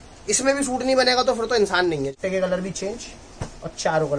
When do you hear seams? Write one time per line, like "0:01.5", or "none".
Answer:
0:02.2